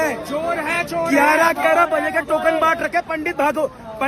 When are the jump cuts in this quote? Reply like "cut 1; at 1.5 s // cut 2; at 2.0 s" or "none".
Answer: none